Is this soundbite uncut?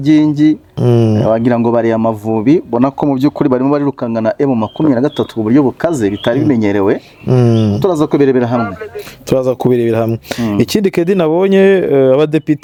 yes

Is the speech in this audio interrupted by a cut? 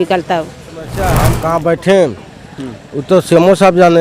yes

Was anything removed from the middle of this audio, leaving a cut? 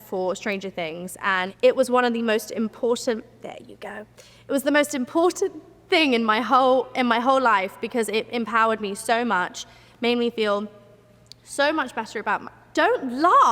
yes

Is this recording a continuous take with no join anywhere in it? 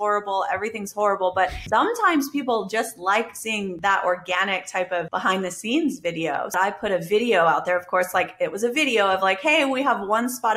no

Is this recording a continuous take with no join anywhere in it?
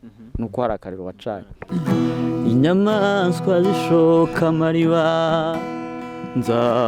no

